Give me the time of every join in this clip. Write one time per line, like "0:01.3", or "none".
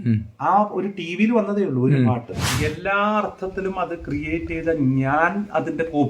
0:02.5

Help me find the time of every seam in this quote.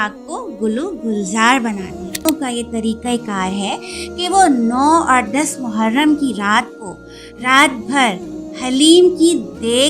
0:02.3

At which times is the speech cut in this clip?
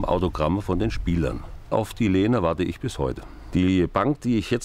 0:01.7
0:03.3

